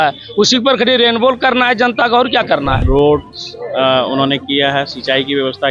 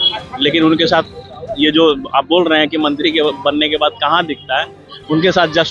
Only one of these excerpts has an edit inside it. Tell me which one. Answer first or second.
first